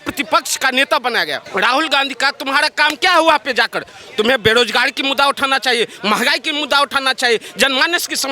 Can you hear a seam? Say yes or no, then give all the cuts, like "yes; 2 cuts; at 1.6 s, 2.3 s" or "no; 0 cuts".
yes; 1 cut; at 1.4 s